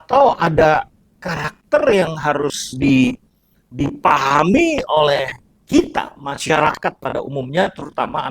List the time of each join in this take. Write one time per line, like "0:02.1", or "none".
none